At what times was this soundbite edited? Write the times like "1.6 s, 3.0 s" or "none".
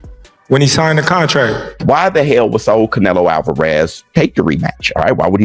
1.7 s